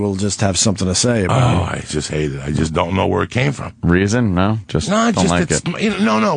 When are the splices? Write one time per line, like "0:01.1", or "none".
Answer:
0:02.3